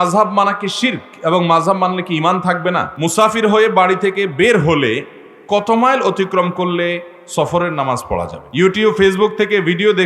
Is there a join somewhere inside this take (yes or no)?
yes